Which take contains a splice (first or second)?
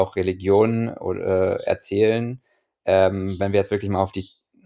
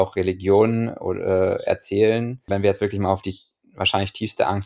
second